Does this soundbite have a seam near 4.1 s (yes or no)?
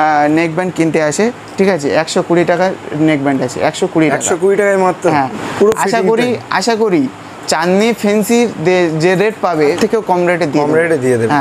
no